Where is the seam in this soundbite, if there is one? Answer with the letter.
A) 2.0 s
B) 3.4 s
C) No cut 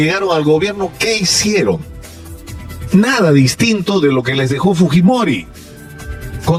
C